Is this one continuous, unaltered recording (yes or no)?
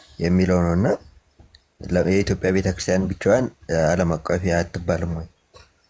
yes